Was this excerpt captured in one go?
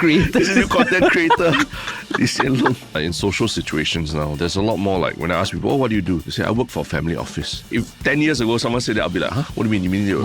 no; 3 cuts; at 2.9 s, 6.3 s, 7.7 s

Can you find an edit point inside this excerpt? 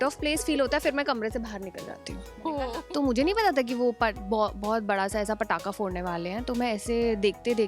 yes; 1 cut; at 2.8 s

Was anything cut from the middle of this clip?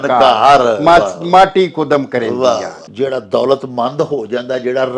yes; 1 cut; at 2.8 s

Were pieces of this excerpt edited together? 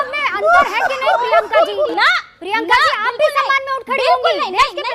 yes; 1 cut; at 1.9 s

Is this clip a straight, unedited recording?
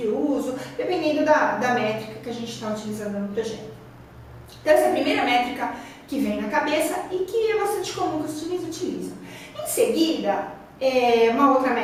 yes; 0 cuts

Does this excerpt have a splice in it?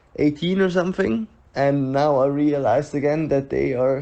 yes; 1 cut; at 1.4 s

